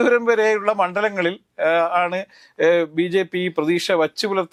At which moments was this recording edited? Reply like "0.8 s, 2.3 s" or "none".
none